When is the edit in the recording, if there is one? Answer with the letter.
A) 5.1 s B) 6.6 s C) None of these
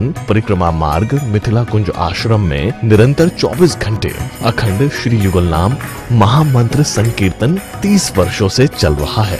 C